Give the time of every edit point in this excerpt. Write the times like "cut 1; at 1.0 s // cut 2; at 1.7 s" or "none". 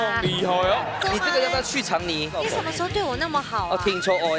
cut 1; at 0.9 s